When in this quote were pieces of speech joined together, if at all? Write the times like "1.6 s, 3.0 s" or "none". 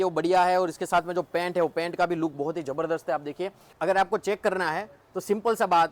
3.7 s